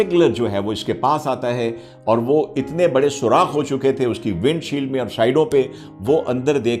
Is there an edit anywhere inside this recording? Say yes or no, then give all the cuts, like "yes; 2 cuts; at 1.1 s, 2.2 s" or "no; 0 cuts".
no; 0 cuts